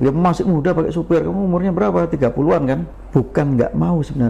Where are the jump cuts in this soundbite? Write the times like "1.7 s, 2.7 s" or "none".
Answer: 2.9 s